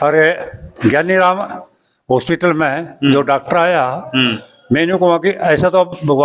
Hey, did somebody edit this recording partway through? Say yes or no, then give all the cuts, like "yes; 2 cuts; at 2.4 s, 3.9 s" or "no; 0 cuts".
no; 0 cuts